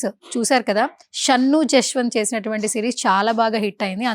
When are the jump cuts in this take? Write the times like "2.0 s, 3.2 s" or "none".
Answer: 1.1 s